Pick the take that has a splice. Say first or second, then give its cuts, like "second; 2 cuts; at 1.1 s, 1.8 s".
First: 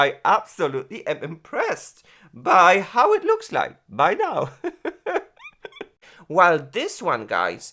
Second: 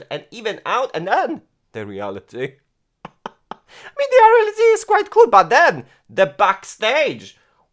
first; 1 cut; at 6.1 s